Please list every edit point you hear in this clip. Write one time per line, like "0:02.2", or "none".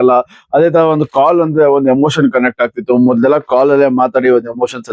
0:03.8